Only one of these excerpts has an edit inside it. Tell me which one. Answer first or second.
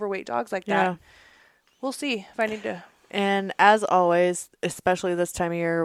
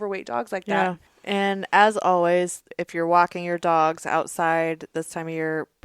second